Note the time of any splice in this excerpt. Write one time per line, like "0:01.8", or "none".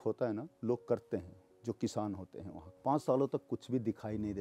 0:02.6